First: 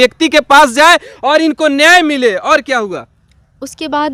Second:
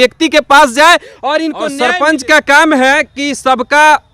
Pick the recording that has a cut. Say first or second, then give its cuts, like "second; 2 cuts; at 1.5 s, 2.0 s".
second; 1 cut; at 1.7 s